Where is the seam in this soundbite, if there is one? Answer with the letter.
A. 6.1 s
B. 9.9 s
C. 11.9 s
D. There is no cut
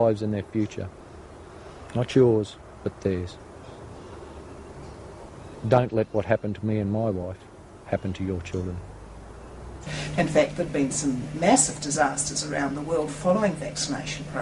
B